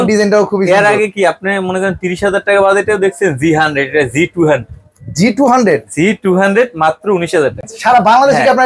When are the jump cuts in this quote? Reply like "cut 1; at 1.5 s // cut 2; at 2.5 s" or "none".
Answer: cut 1; at 7.7 s